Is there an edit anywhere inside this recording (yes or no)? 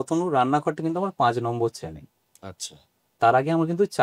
no